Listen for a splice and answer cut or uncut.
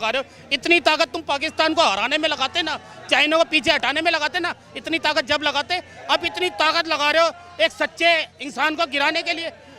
uncut